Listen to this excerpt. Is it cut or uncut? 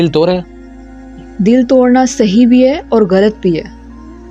uncut